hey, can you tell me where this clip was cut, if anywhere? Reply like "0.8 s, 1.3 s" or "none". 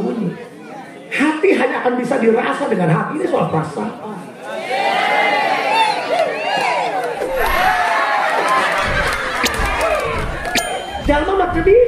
10.9 s